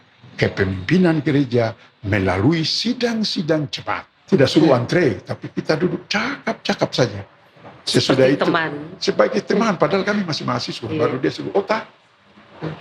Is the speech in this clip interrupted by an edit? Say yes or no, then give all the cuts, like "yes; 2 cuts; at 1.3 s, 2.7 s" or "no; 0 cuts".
yes; 1 cut; at 4.1 s